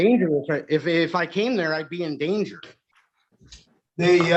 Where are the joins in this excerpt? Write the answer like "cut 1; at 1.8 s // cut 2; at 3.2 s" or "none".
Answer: none